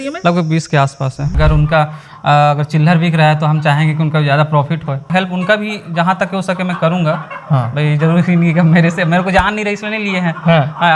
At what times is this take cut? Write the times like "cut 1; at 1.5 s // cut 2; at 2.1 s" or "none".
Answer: cut 1; at 1.4 s // cut 2; at 5.1 s

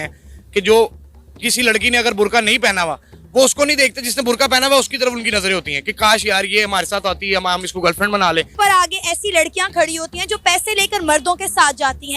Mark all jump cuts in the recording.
cut 1; at 8.5 s

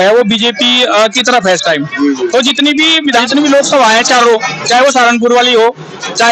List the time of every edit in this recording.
none

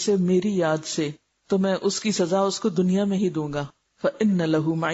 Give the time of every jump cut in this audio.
cut 1; at 3.8 s

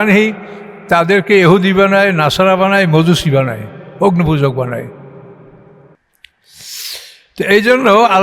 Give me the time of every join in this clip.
cut 1; at 6.0 s

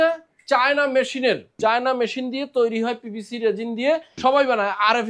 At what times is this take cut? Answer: cut 1; at 1.5 s // cut 2; at 4.1 s

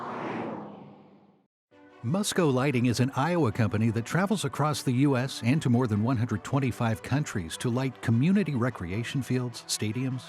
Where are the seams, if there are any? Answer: cut 1; at 1.0 s

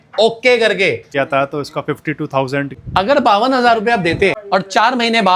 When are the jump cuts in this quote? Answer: cut 1; at 1.1 s // cut 2; at 2.7 s // cut 3; at 4.4 s

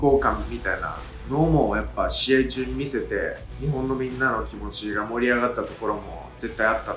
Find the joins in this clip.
none

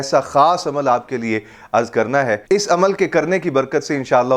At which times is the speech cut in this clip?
none

